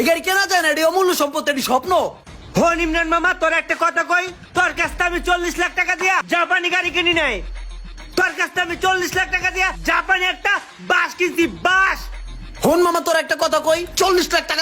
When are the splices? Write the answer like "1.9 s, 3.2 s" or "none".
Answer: none